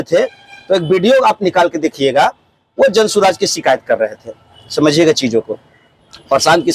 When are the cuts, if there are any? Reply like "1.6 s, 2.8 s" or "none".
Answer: none